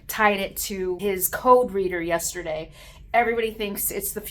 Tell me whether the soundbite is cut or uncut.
cut